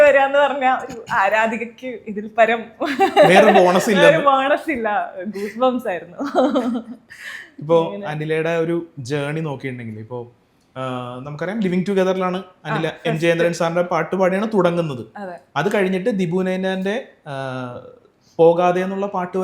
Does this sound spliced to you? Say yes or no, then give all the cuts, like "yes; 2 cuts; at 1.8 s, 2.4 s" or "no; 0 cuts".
no; 0 cuts